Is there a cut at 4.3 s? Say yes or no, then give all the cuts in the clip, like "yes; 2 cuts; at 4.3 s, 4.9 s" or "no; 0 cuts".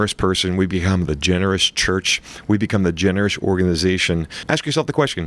yes; 1 cut; at 4.3 s